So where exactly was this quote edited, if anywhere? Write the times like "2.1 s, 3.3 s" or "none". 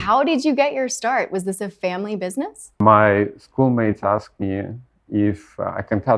2.8 s